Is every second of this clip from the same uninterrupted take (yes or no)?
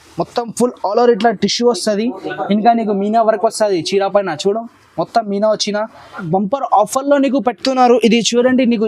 no